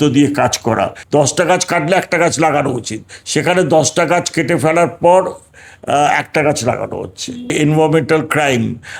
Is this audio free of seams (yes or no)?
no